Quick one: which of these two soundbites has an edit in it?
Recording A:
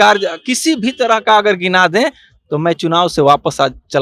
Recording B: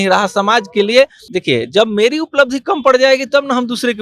B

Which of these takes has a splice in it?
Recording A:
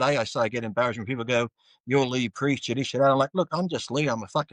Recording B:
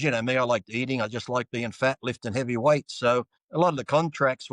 B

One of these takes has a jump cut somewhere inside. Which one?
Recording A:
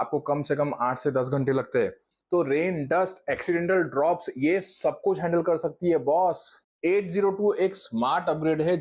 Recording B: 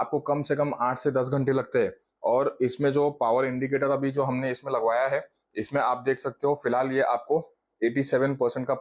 A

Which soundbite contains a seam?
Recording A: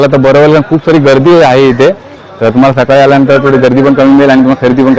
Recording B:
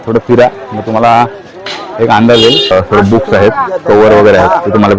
B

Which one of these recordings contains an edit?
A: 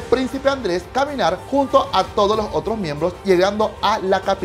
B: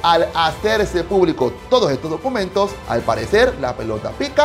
A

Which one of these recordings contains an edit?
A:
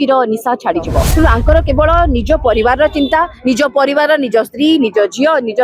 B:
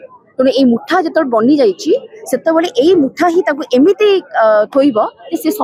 A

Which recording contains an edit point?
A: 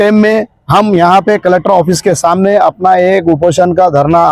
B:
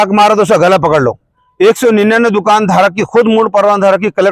B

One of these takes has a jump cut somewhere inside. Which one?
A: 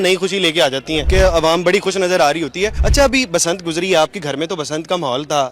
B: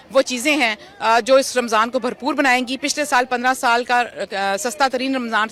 A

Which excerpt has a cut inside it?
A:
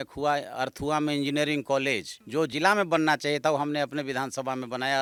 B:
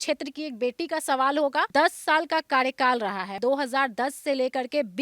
B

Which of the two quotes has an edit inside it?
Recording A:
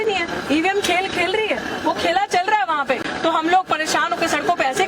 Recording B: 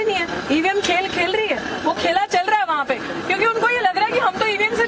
B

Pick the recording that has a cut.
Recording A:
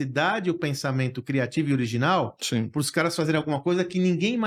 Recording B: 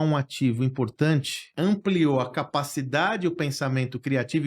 B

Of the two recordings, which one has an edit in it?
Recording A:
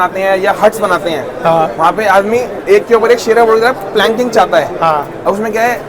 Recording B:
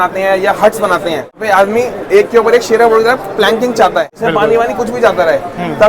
B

